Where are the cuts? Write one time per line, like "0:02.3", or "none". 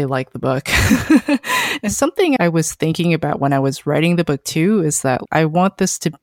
0:01.8

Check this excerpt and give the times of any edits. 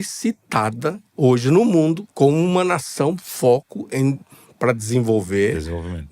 0:02.0

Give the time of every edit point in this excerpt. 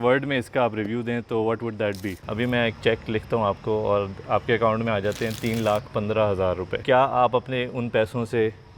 0:02.1
0:06.7

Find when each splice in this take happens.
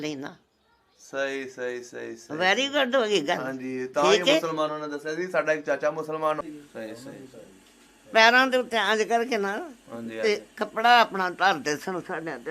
0:06.4

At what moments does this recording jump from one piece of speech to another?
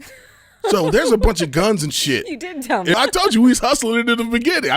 0:02.9

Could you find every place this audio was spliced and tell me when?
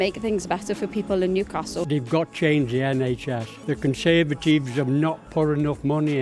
0:01.8
0:03.5

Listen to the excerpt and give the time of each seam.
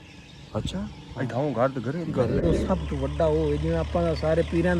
0:02.4

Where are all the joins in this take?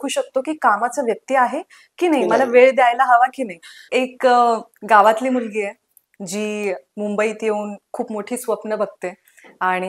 0:03.8

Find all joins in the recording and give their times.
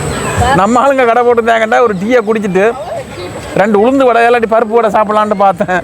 none

